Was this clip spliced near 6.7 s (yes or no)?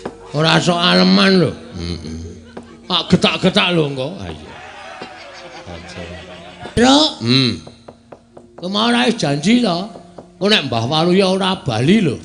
yes